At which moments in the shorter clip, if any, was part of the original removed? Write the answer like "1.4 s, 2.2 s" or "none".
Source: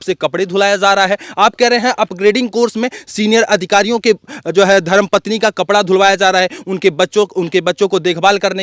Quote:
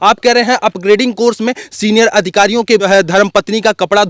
2.9 s